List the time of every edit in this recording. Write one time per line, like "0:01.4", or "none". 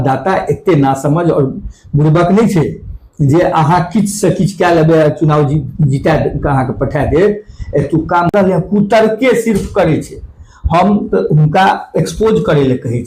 0:08.3